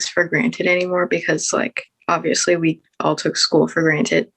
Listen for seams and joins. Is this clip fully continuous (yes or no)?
yes